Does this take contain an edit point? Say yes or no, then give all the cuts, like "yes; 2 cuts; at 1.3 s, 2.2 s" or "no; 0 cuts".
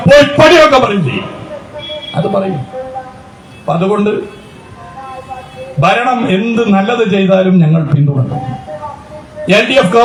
no; 0 cuts